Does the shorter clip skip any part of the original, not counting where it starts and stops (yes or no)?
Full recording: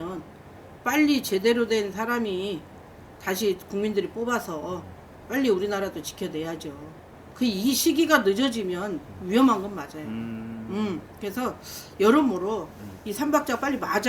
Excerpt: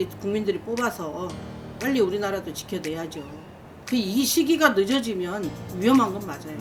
no